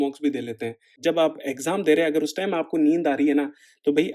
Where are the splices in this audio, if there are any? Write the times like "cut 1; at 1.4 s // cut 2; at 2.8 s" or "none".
cut 1; at 0.9 s